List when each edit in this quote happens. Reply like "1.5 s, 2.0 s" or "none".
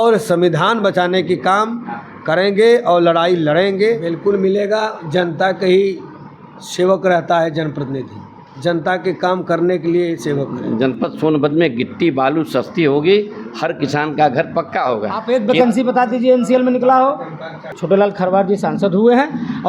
4.2 s, 10.6 s, 15.1 s, 17.7 s